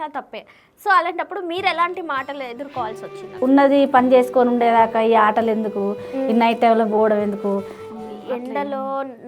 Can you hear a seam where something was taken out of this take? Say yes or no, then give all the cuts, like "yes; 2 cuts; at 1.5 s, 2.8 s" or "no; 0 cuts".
yes; 2 cuts; at 3.4 s, 7.8 s